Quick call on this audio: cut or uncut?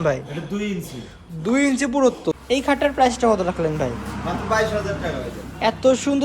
cut